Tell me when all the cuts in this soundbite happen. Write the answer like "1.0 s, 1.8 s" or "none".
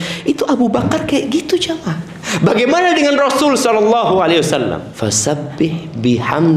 4.9 s